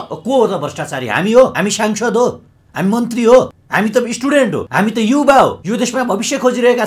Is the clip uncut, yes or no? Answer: no